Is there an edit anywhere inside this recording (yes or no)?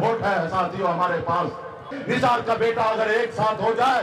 yes